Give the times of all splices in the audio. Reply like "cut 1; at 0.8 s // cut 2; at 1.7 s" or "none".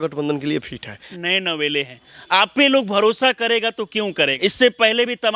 cut 1; at 1.1 s // cut 2; at 4.3 s